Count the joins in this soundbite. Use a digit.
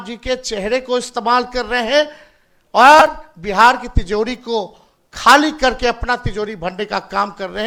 0